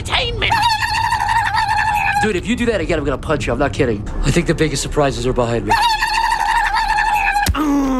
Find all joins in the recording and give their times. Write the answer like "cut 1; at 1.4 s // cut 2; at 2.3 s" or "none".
none